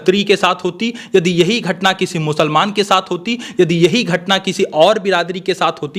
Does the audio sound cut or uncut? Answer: uncut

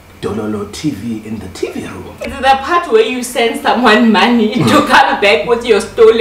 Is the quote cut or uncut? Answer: cut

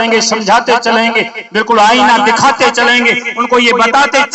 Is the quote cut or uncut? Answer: uncut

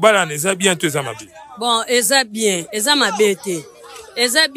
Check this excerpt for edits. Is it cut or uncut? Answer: uncut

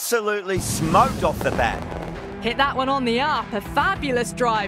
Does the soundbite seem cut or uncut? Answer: cut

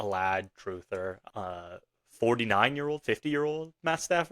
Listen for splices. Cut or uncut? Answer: cut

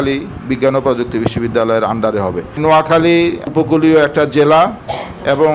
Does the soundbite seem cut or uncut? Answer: cut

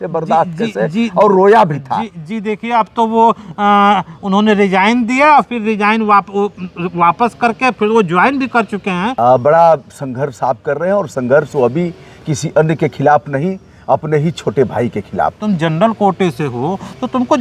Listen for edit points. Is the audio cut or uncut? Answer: cut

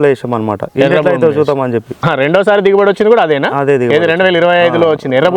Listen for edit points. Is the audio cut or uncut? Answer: cut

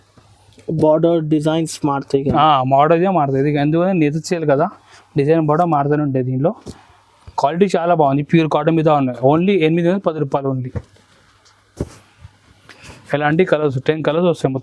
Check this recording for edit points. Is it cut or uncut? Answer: uncut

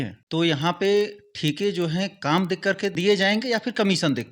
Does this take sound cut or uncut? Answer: uncut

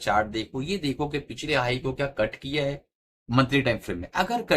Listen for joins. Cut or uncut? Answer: uncut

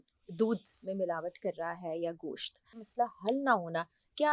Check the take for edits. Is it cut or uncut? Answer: cut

